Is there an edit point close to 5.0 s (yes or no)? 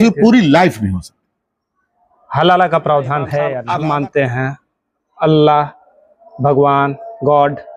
no